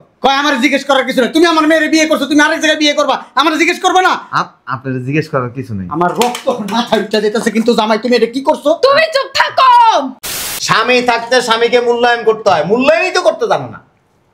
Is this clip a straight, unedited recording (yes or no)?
no